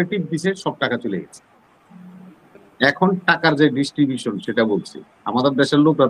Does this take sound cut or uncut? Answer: uncut